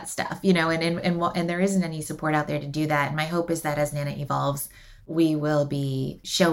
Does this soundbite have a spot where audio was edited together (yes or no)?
no